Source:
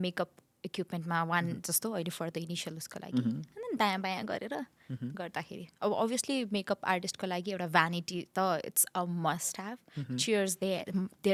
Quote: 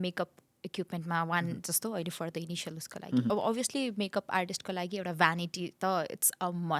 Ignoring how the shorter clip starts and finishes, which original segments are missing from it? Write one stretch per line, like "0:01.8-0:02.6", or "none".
0:03.3-0:05.8